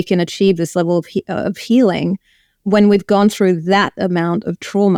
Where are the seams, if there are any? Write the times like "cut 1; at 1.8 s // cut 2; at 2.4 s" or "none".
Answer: none